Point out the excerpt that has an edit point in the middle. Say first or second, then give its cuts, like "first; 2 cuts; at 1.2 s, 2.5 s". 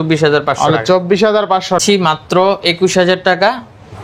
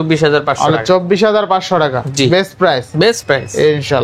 first; 1 cut; at 1.8 s